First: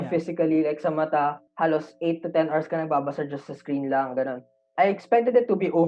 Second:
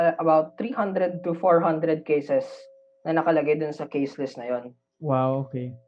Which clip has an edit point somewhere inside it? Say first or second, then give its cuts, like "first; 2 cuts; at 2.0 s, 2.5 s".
first; 2 cuts; at 1.4 s, 4.6 s